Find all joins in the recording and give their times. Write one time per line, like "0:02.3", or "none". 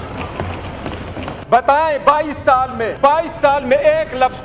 0:01.3
0:02.9